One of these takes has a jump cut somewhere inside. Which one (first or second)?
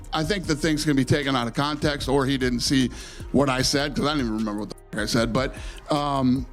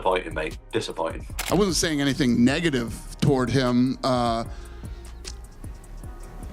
second